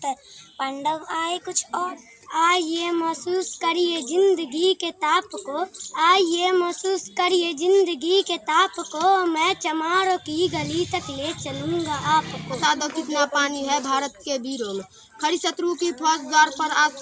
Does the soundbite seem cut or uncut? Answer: cut